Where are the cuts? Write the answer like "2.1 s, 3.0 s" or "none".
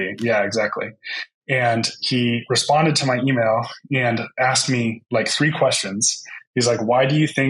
none

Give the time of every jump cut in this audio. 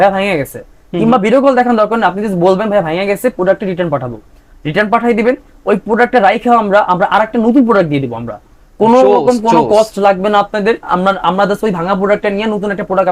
none

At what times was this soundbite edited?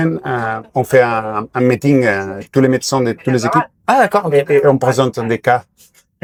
none

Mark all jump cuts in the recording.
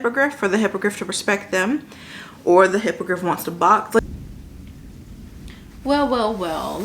4.0 s

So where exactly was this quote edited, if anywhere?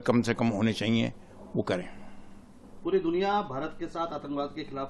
none

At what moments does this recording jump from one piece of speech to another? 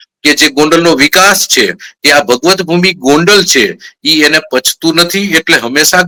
none

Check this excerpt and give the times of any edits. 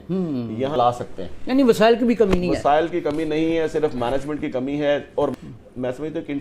0.8 s, 5.3 s

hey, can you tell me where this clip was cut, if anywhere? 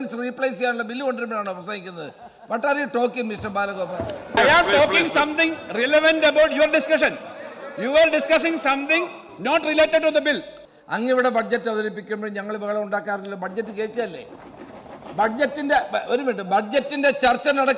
4.4 s, 10.5 s

